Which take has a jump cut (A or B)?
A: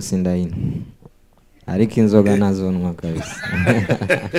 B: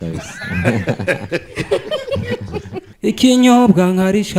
B